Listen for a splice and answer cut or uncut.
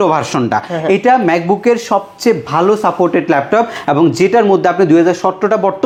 uncut